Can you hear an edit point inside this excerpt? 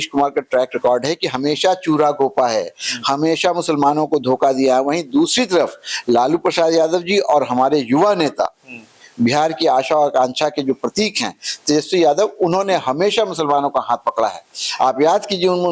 no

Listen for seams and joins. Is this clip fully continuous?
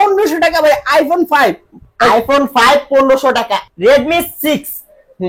no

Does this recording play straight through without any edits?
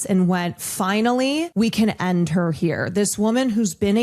no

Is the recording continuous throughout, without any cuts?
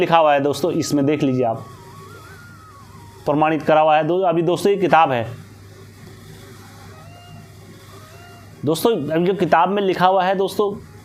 yes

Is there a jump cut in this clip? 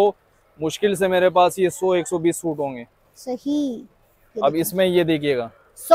no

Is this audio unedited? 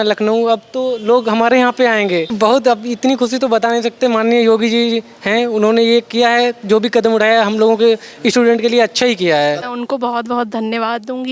no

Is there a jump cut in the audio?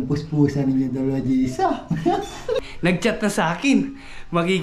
yes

